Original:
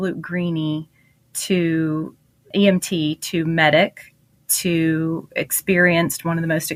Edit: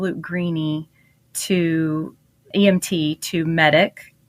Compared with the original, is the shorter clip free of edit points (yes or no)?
yes